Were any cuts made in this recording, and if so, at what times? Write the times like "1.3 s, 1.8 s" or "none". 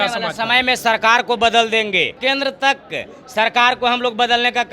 2.1 s